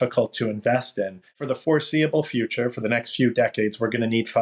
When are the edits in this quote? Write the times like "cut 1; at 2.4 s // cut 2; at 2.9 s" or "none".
cut 1; at 1.4 s